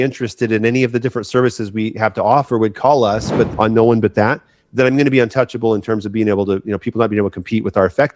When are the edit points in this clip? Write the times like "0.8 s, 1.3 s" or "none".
3.5 s